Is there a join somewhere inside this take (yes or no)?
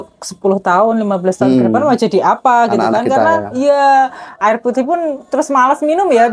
no